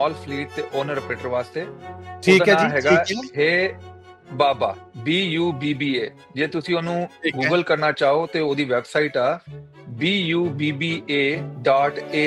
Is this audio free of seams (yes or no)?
yes